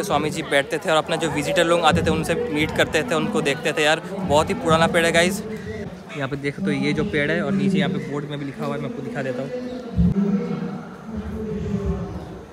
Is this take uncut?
yes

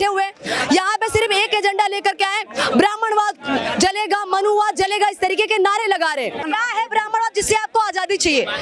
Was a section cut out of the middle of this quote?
yes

